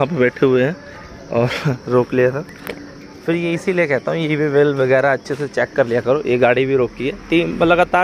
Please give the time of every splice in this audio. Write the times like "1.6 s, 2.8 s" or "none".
none